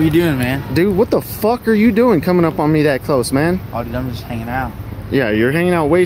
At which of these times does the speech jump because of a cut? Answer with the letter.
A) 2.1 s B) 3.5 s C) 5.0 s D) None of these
D